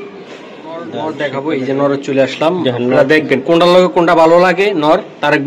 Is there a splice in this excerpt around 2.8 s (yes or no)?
no